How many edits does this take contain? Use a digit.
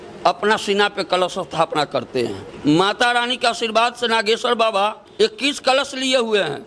2